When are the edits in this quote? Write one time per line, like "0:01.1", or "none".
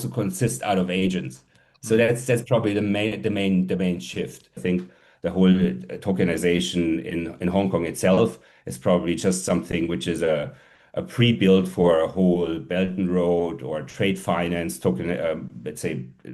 0:04.6